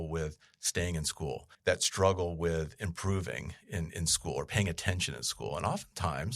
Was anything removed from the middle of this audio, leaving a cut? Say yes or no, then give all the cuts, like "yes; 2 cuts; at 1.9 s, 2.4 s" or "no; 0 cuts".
yes; 1 cut; at 1.5 s